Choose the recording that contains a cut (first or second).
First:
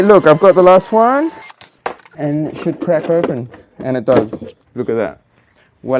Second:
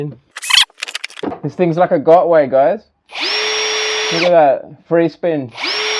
second